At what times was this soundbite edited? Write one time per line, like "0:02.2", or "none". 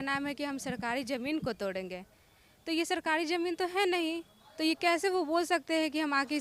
none